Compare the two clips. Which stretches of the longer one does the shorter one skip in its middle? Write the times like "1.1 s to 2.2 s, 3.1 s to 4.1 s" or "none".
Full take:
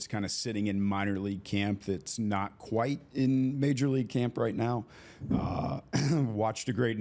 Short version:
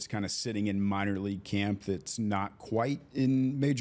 none